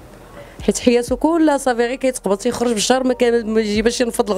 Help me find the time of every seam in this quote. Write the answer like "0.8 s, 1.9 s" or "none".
none